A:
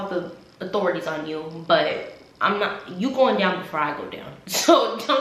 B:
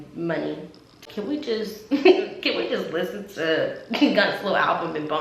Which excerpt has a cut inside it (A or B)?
B